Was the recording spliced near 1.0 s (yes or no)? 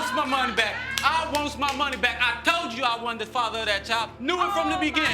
no